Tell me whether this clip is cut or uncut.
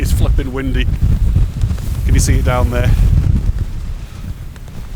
uncut